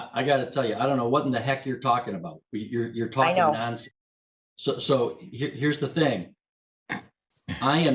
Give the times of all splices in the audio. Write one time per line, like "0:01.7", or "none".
none